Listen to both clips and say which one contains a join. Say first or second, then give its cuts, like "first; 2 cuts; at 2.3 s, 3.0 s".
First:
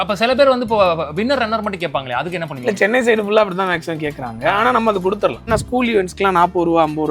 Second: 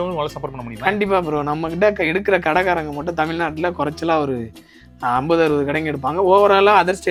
first; 1 cut; at 5.5 s